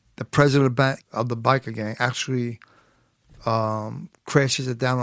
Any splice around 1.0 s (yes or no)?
yes